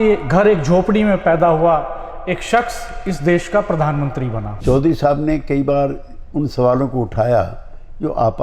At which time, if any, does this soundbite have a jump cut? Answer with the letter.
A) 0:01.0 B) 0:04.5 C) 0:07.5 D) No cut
B